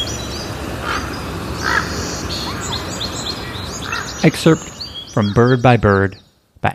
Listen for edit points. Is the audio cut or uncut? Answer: cut